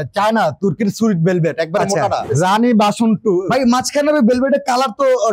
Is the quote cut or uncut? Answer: cut